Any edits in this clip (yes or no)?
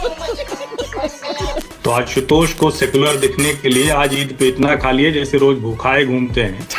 yes